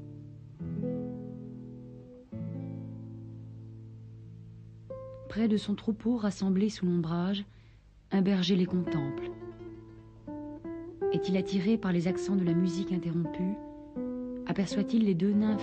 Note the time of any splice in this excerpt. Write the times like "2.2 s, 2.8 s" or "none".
13.3 s